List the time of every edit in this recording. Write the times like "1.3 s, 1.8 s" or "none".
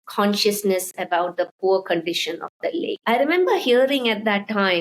none